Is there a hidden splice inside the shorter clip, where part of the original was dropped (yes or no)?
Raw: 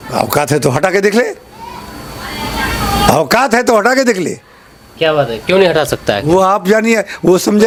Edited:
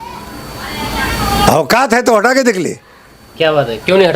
no